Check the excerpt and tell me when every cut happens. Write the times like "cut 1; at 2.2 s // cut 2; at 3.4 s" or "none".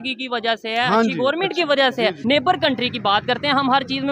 cut 1; at 2.2 s